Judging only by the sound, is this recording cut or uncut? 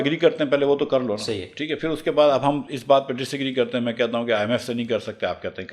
uncut